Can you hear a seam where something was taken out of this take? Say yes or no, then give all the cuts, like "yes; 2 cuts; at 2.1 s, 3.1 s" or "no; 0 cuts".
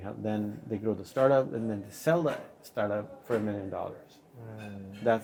no; 0 cuts